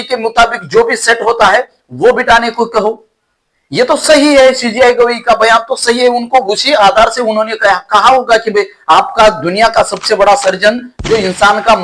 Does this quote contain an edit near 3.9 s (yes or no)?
yes